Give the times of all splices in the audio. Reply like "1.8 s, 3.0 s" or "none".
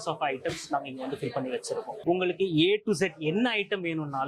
2.0 s